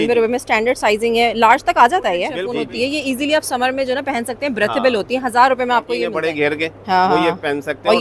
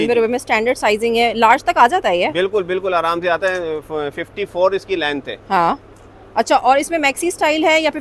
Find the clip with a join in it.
first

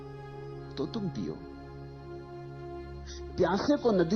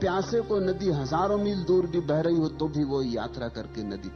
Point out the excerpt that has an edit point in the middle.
first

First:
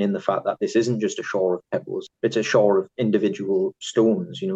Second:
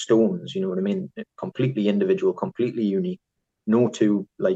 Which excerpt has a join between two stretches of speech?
first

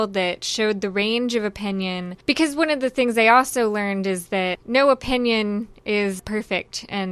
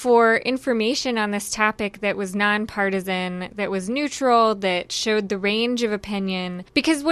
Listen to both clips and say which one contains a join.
first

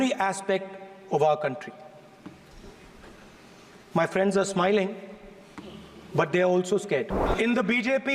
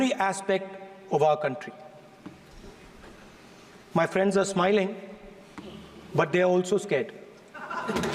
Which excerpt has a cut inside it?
first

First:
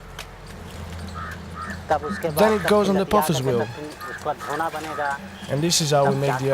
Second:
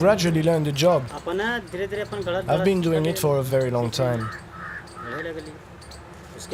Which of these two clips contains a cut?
first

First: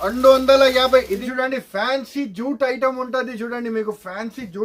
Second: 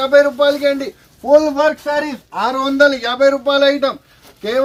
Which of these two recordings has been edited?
first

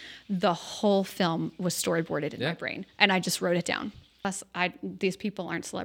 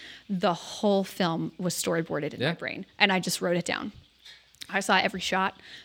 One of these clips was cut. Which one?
first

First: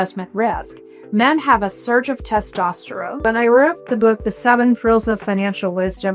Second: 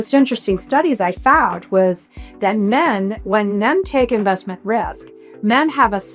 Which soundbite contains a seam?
first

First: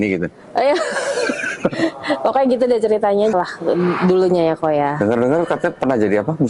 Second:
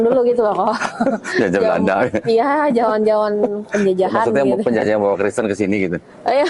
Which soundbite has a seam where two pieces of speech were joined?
first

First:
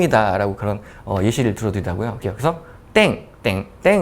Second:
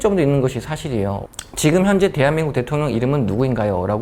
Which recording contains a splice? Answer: first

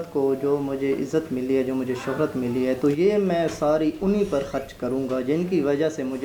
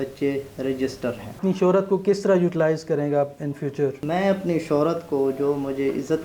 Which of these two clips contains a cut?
second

